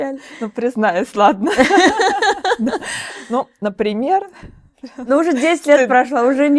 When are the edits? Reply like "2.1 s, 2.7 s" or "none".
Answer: none